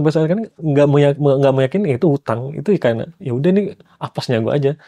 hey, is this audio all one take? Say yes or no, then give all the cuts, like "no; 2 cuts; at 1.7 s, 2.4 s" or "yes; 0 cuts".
yes; 0 cuts